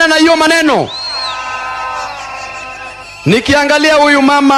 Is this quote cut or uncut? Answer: uncut